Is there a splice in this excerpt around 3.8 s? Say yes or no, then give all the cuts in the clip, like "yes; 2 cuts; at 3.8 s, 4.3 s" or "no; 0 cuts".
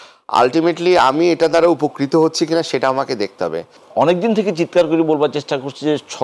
yes; 1 cut; at 3.8 s